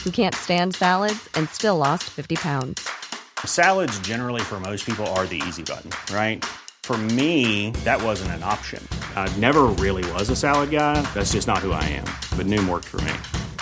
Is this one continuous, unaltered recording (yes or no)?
yes